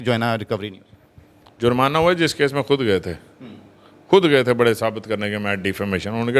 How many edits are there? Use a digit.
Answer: 0